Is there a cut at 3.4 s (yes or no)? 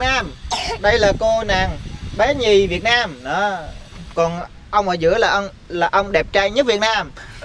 no